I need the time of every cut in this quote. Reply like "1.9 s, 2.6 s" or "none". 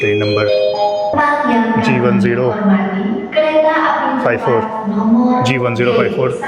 1.1 s